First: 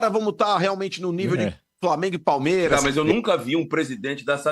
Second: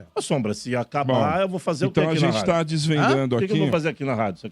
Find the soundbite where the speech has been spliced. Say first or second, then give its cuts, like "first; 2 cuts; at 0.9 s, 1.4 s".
first; 1 cut; at 2.8 s